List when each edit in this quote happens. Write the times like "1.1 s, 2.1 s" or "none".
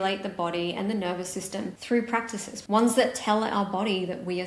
1.8 s, 2.6 s